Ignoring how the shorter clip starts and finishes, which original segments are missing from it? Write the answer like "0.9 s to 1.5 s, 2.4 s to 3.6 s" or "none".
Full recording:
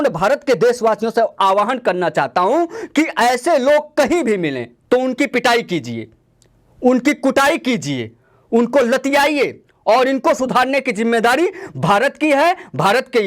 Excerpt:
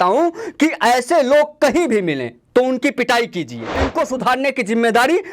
6.2 s to 10.2 s

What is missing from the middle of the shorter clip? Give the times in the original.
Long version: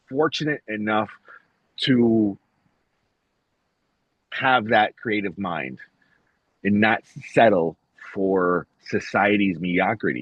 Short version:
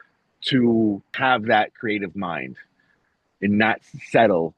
2.4 s to 4.3 s

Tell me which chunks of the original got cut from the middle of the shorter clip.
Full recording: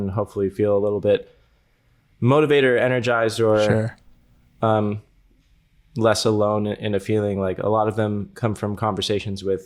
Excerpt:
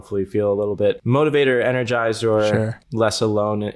1.3 s to 2.2 s, 4.0 s to 5.8 s

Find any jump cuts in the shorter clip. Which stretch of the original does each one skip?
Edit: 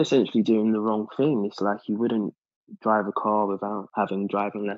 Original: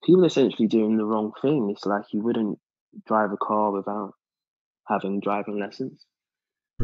4.1 s to 4.8 s

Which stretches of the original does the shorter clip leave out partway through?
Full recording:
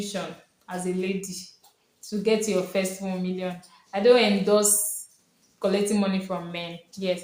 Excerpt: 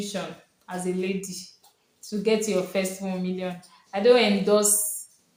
none

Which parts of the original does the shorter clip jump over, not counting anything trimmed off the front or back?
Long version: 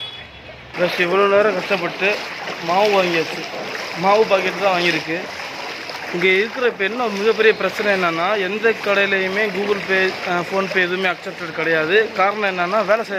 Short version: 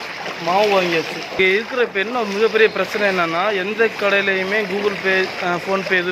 3.6 s to 6.2 s

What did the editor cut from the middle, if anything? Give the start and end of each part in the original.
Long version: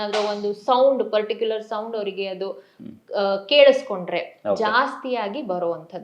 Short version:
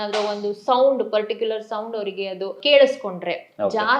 2.6 s to 3.4 s

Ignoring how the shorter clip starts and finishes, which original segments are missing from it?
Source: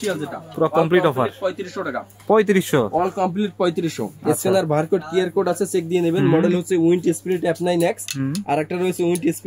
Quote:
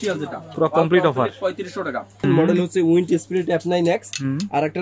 2.2 s to 6.2 s

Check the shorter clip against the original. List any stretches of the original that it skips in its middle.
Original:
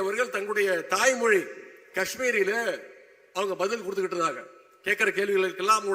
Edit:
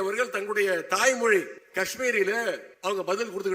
1.6 s to 1.8 s, 2.9 s to 3.2 s

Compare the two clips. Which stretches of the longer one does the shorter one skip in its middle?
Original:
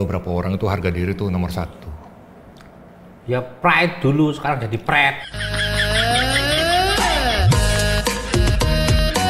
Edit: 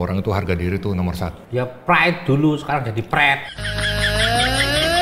1.8 s to 3.2 s

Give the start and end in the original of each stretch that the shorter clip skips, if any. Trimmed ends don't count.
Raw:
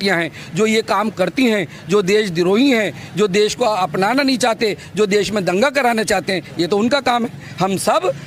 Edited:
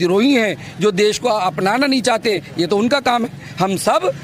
4.8 s to 6.5 s

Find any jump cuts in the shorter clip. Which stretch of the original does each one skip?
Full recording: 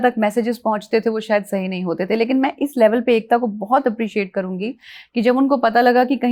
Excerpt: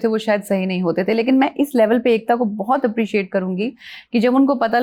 none

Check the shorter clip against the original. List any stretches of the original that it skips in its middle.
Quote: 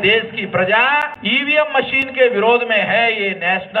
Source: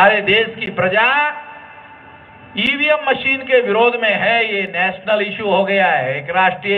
1.4 s to 2.5 s

